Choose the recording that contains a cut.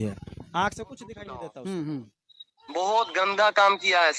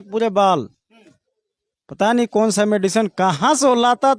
first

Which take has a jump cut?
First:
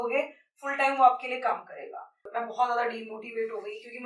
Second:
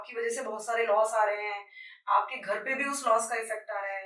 first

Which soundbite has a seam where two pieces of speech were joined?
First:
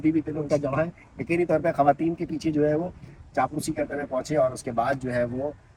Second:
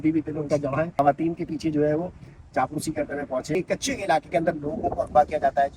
second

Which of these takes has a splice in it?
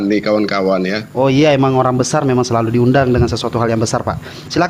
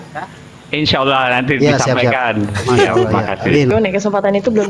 second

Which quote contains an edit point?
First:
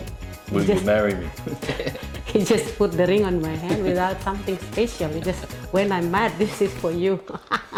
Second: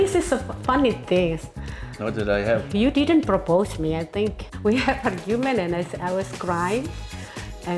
second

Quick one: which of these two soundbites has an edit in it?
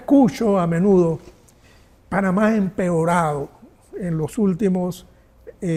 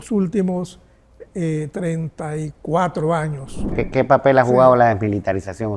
second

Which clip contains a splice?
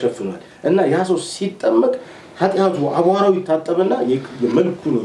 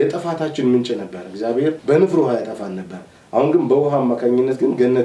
second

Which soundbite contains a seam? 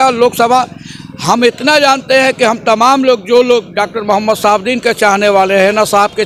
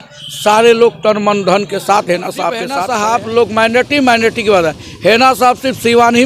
second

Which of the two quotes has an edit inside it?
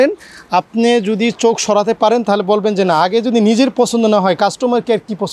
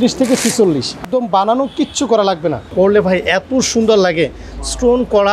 second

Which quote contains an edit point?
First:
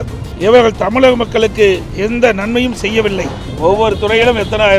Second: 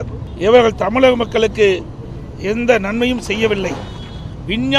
first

